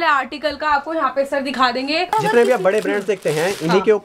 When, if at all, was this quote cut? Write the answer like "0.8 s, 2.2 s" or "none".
2.1 s